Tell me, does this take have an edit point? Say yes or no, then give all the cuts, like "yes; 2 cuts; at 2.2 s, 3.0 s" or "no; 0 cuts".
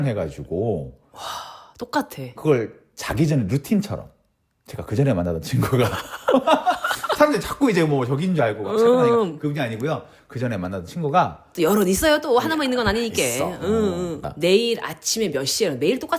yes; 1 cut; at 14.2 s